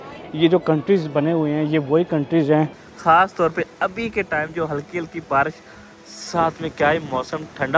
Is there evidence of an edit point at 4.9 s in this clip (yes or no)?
no